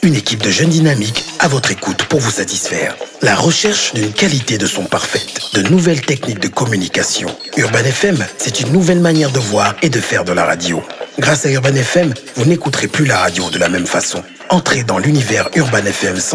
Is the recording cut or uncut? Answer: uncut